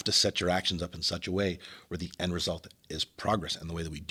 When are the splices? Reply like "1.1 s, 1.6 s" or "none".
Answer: none